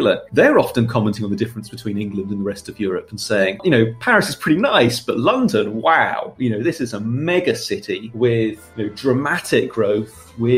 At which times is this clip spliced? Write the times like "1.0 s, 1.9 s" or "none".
none

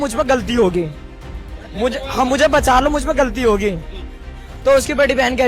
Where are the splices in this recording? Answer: none

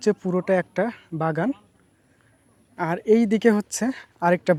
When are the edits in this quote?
none

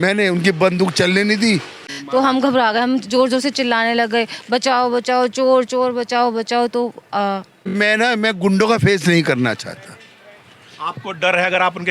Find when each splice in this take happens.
1.9 s, 7.5 s

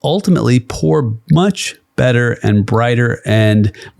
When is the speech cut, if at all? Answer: 1.2 s

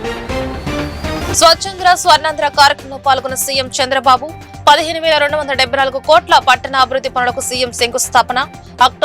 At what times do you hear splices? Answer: 1.2 s

